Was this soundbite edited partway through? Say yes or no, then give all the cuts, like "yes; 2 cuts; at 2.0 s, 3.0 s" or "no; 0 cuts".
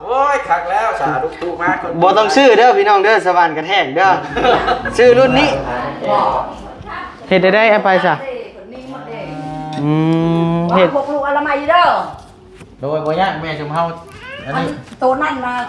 yes; 1 cut; at 5.6 s